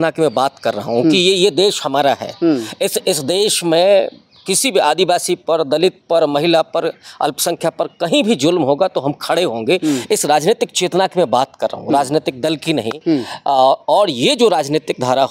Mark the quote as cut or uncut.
uncut